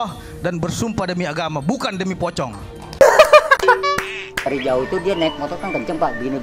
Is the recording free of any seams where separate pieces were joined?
no; 1 cut; at 4.5 s

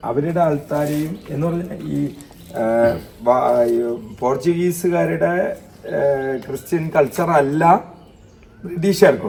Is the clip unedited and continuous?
yes; 0 cuts

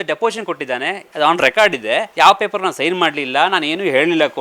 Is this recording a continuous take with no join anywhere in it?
no; 1 cut; at 2.1 s

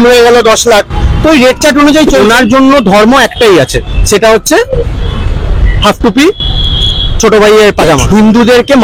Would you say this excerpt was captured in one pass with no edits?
no; 2 cuts; at 2.2 s, 8.0 s

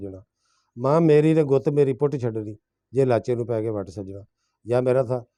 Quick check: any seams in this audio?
no; 0 cuts

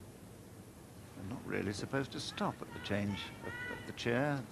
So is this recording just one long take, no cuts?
no; 1 cut; at 3.5 s

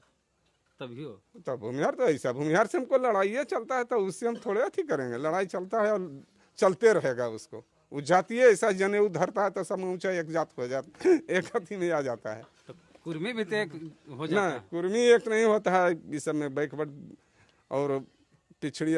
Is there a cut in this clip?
no; 0 cuts

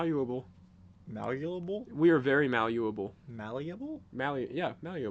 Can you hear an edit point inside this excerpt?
no; 0 cuts

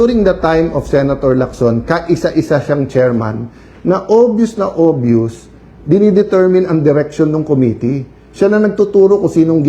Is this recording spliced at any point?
no; 0 cuts

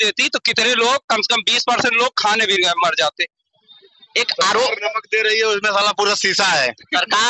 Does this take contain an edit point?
no; 0 cuts

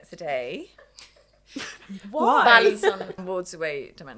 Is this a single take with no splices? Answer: no; 1 cut; at 3.2 s

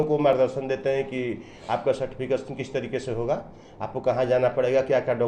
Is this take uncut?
yes; 0 cuts

